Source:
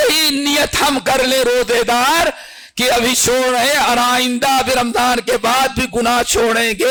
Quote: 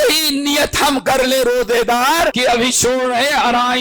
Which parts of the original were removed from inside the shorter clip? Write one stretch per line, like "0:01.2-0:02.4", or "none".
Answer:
0:02.4-0:02.8